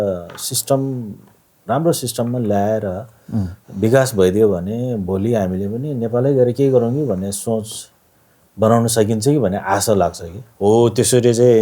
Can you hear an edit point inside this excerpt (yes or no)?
yes